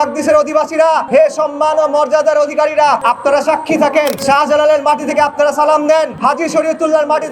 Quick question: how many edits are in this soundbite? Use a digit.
4